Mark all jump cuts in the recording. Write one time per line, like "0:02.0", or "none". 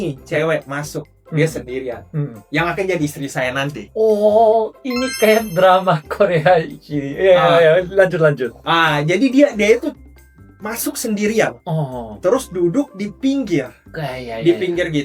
none